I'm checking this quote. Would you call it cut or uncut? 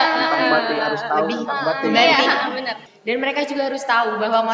cut